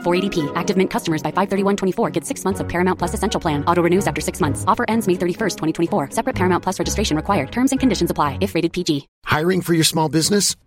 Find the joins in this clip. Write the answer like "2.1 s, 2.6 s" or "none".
9.1 s